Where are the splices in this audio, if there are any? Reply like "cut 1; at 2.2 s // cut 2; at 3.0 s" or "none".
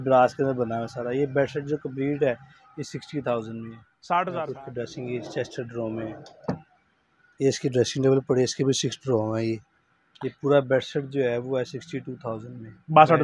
cut 1; at 4.4 s